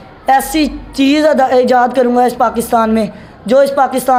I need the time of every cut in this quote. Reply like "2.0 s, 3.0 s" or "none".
none